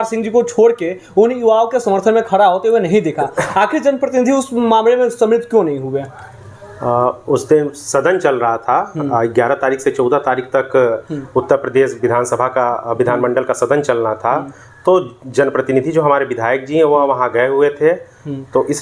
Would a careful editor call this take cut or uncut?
uncut